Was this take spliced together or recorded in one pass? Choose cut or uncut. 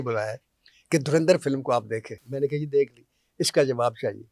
cut